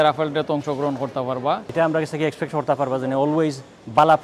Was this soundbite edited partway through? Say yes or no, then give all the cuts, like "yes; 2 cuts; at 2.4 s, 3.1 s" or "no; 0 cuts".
yes; 1 cut; at 1.7 s